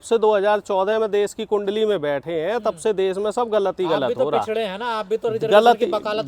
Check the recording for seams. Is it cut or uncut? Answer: uncut